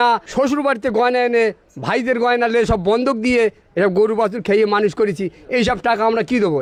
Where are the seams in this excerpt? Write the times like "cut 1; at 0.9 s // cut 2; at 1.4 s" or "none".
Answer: none